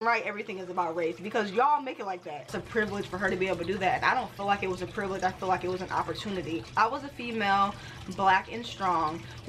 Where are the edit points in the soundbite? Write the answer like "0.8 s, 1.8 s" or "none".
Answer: 2.6 s, 6.6 s